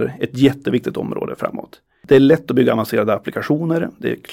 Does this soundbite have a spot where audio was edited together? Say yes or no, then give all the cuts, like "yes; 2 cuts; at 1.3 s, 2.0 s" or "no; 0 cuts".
yes; 1 cut; at 2.0 s